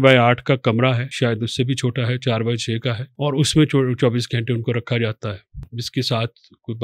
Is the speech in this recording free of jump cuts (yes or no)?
no